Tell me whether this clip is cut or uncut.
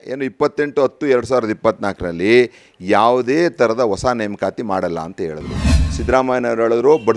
cut